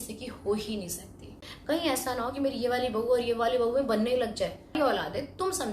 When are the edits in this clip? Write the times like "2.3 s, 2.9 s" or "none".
1.5 s, 4.8 s